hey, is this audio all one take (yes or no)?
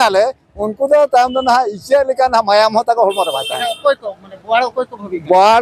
yes